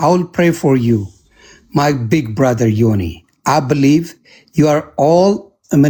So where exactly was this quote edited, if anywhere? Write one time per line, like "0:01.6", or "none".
none